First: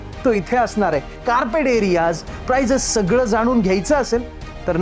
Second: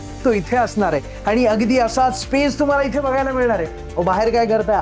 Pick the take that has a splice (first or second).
first